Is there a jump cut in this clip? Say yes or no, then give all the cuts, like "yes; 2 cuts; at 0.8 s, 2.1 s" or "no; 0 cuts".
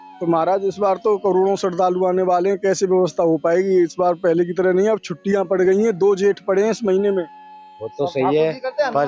no; 0 cuts